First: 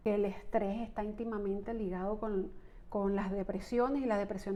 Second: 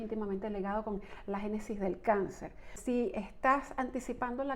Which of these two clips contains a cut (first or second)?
second